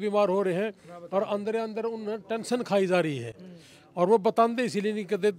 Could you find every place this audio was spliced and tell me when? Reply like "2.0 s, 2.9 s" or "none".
none